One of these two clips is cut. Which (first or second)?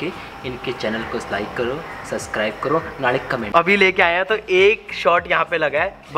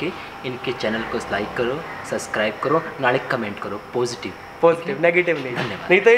first